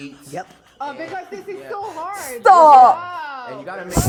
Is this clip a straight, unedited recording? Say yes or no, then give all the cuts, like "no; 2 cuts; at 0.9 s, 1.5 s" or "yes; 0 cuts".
yes; 0 cuts